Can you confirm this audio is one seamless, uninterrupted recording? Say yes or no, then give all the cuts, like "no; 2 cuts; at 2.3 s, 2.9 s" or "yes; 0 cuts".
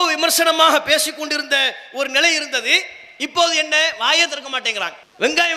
yes; 0 cuts